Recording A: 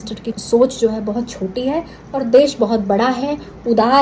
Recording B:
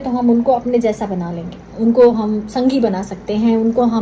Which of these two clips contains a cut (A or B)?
B